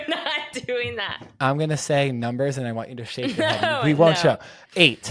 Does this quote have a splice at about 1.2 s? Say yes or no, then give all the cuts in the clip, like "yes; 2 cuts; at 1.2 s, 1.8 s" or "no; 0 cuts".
yes; 1 cut; at 1.2 s